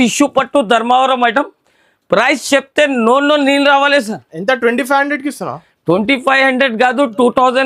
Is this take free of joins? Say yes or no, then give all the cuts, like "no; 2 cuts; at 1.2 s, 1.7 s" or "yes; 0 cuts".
yes; 0 cuts